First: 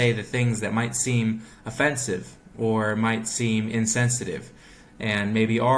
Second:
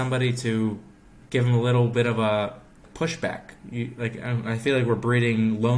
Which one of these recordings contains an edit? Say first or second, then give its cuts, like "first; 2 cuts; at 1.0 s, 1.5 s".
second; 3 cuts; at 1.2 s, 2.9 s, 3.5 s